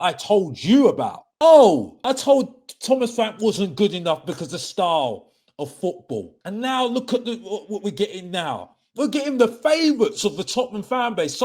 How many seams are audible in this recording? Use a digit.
3